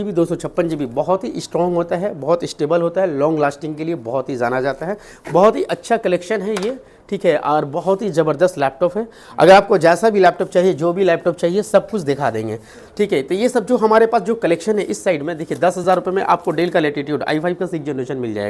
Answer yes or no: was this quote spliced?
no